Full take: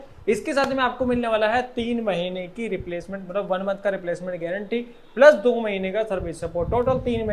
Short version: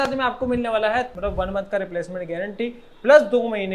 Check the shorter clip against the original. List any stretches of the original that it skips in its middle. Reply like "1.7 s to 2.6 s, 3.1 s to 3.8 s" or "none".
1.7 s to 3.2 s